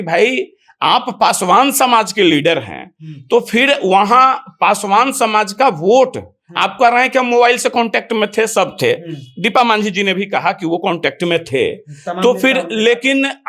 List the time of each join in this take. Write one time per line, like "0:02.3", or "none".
none